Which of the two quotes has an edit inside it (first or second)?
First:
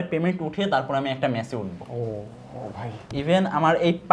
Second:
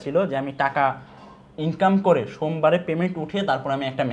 first